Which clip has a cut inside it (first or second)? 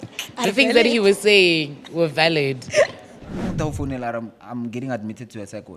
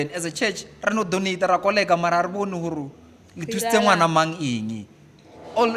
first